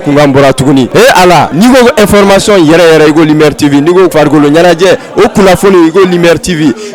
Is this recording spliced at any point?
yes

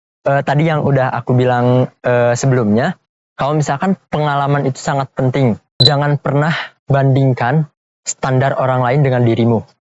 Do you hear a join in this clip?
yes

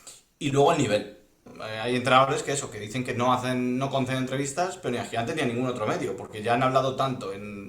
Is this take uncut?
no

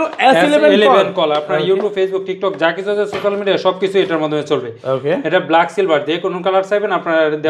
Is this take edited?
no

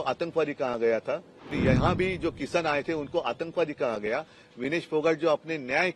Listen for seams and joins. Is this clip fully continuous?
no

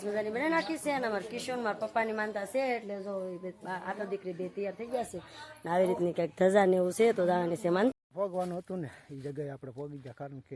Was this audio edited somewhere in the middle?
yes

